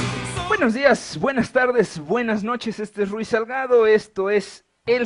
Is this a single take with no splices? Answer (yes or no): yes